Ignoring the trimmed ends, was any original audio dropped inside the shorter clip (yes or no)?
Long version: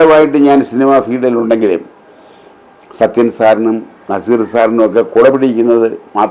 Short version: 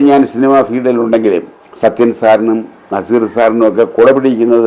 yes